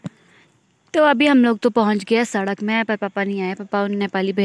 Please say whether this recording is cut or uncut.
uncut